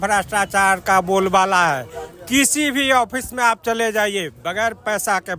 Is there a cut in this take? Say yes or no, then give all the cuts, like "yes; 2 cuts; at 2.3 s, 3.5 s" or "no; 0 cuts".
no; 0 cuts